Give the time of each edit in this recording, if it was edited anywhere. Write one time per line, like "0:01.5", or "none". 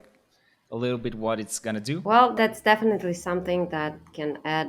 0:02.3

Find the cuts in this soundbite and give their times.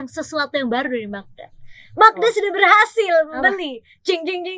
none

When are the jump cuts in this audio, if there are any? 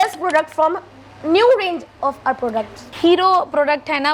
none

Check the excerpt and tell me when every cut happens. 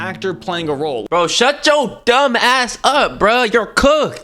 0:01.0

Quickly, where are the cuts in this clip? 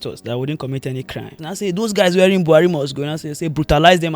0:01.4

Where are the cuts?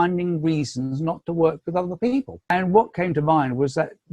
0:02.5

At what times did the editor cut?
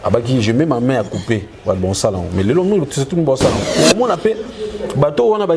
0:03.6

